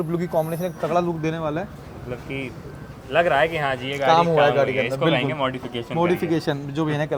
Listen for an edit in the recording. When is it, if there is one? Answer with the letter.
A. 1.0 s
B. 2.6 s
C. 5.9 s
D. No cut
D